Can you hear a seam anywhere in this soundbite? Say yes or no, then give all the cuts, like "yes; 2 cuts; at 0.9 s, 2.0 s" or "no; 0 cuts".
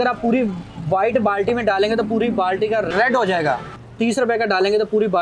yes; 2 cuts; at 2.9 s, 3.8 s